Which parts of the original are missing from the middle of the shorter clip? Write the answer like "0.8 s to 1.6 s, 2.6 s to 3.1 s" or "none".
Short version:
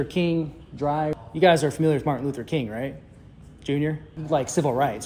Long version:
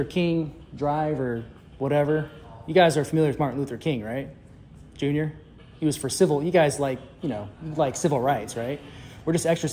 1.2 s to 2.5 s, 5.4 s to 7.6 s